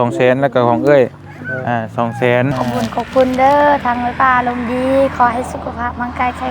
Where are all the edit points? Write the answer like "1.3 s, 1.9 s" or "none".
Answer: 2.6 s